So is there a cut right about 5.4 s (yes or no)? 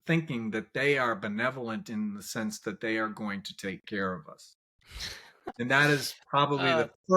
yes